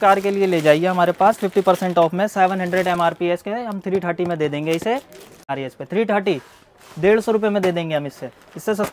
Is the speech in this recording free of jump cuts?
no; 1 cut; at 5.5 s

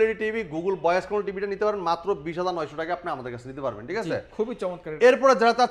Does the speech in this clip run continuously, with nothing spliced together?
yes; 0 cuts

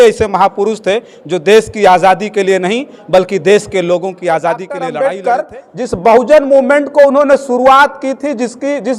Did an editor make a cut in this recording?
yes; 1 cut; at 4.9 s

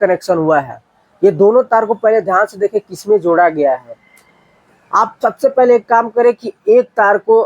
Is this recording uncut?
yes; 0 cuts

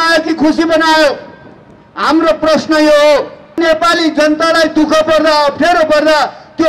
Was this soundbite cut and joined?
yes; 1 cut; at 3.6 s

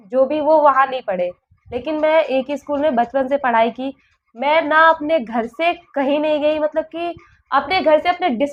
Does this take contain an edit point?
no; 0 cuts

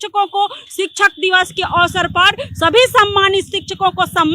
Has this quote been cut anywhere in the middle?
no; 0 cuts

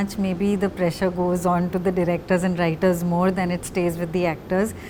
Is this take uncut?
yes; 0 cuts

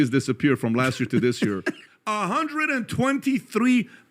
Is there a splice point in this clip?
yes; 1 cut; at 1.8 s

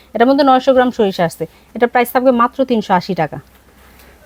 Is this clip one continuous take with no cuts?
yes; 0 cuts

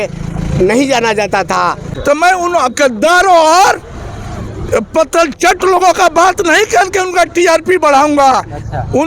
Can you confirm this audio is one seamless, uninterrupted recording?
no; 1 cut; at 1.9 s

